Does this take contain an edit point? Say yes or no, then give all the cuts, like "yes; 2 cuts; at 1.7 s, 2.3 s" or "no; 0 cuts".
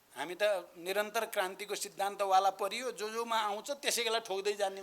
no; 0 cuts